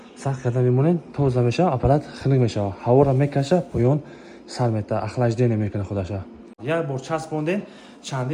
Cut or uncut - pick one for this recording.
cut